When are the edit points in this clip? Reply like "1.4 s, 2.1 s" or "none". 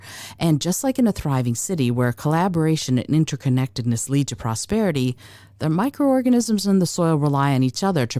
none